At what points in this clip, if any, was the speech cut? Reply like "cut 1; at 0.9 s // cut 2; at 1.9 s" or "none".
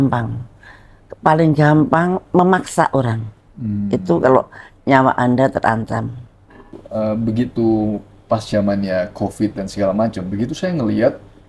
cut 1; at 6.8 s